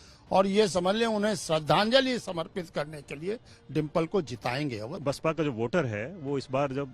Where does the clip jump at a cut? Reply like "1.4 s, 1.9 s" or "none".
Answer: 4.9 s